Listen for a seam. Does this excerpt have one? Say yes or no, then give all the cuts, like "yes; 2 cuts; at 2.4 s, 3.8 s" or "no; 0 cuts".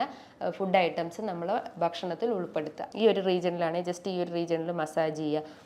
yes; 1 cut; at 2.8 s